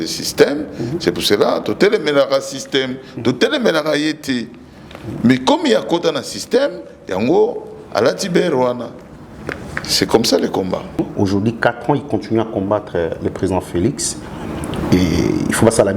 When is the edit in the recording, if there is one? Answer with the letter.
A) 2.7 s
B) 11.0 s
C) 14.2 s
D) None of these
B